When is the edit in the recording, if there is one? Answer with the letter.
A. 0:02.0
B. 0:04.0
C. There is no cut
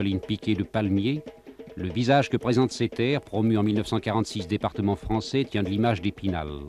B